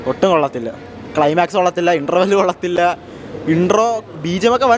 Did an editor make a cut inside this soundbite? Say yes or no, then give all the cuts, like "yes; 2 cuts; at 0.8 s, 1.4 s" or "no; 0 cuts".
no; 0 cuts